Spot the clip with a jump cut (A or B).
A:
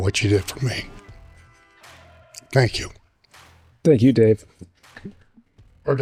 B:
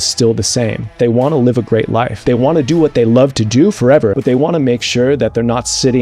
B